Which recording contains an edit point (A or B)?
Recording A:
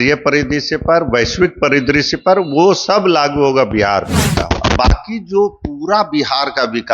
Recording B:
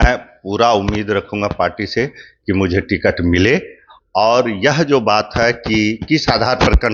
A